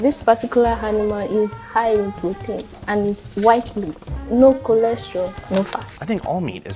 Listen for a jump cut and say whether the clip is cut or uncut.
uncut